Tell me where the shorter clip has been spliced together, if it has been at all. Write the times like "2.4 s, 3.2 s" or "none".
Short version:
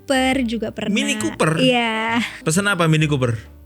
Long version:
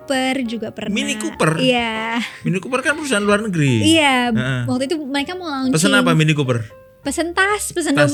2.4 s